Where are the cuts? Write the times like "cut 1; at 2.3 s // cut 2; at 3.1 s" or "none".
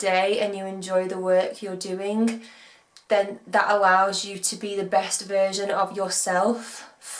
none